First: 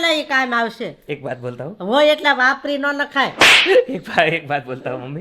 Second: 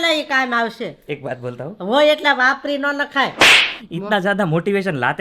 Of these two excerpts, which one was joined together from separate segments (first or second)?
second